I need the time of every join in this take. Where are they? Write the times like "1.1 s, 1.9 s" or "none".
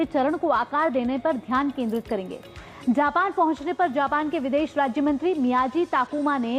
none